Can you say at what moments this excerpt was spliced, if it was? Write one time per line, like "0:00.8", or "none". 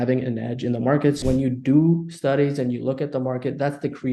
0:01.2